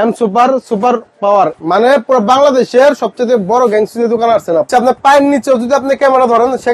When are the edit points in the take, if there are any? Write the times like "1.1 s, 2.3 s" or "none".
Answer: 1.5 s, 4.7 s

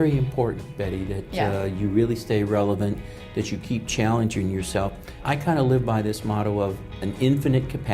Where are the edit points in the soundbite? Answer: 5.2 s

